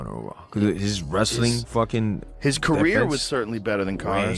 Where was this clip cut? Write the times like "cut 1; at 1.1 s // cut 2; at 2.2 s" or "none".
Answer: none